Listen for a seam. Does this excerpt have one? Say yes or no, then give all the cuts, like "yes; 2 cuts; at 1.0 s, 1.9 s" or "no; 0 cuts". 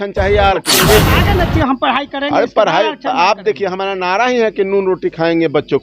yes; 1 cut; at 1.1 s